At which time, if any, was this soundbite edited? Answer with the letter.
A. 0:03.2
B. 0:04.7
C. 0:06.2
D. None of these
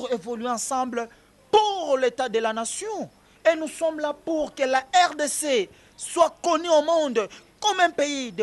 D